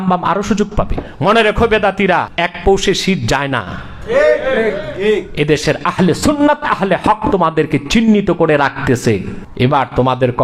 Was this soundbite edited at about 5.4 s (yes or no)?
no